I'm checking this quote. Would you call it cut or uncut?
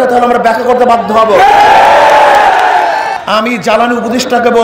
cut